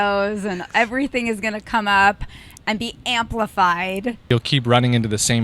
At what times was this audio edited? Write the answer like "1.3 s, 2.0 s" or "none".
4.3 s